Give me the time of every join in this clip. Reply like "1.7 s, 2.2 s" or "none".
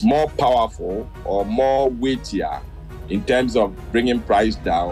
none